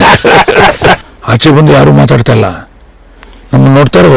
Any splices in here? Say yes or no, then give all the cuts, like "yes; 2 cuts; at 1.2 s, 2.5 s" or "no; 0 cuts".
yes; 1 cut; at 1.0 s